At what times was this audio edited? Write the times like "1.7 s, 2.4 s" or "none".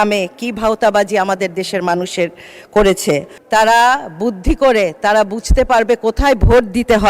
3.3 s